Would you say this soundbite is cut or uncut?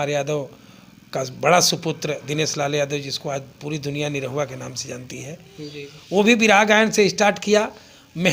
uncut